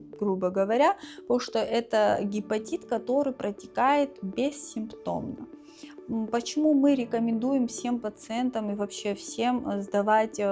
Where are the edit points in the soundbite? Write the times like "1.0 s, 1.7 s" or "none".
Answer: none